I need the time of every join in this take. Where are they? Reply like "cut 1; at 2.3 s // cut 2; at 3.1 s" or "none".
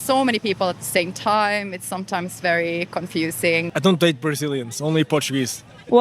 cut 1; at 3.7 s